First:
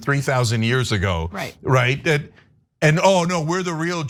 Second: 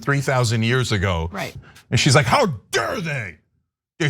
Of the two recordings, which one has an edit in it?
second; 1 cut; at 1.5 s

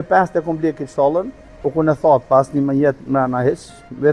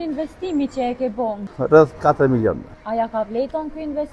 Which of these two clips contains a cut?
second; 2 cuts; at 1.4 s, 2.7 s

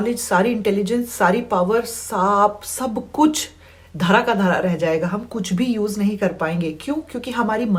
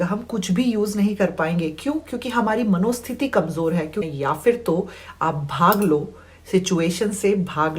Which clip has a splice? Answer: second; 1 cut; at 4.1 s

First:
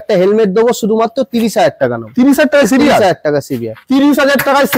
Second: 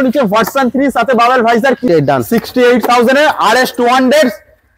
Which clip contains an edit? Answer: second; 1 cut; at 1.8 s

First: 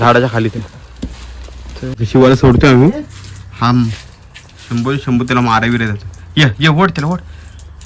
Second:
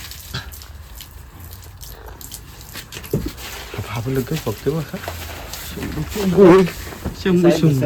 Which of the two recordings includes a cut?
first; 1 cut; at 1.9 s

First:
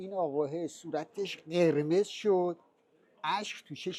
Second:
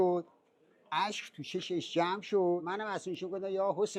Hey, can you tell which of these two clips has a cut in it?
second; 1 cut; at 2.6 s

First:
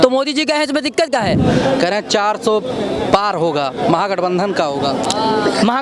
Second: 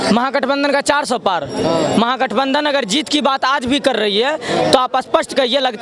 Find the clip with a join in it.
first; 1 cut; at 1.4 s

